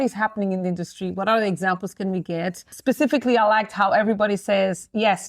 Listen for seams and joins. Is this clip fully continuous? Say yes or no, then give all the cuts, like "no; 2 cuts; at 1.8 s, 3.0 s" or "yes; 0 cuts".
no; 1 cut; at 2.7 s